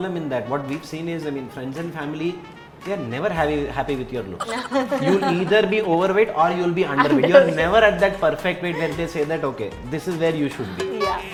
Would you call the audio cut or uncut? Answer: uncut